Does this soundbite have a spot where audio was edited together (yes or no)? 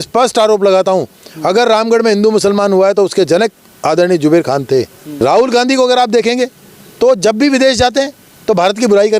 yes